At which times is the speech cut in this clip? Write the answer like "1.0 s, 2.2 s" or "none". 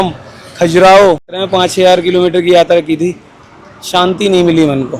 1.4 s